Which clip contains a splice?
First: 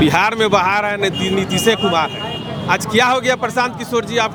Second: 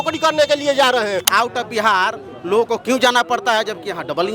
second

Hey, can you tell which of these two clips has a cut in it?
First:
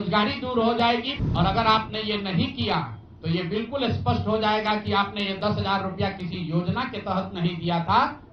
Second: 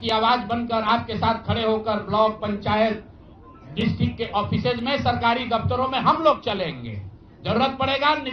first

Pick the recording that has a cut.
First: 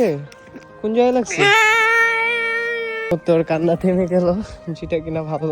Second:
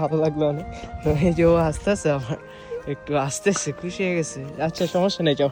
first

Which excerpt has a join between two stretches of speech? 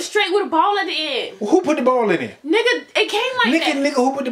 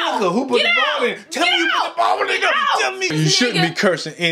second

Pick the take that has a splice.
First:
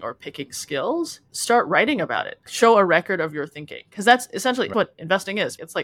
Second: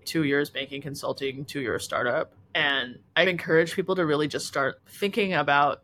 first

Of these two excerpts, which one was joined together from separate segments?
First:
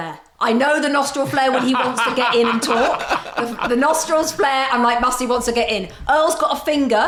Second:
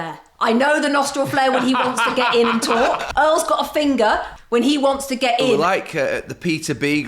second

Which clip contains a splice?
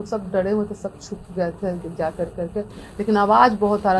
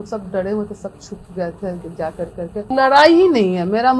second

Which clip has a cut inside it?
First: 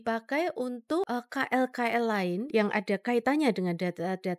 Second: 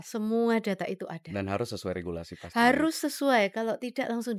first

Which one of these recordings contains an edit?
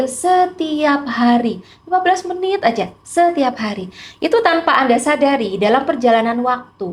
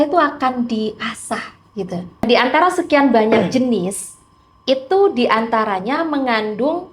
second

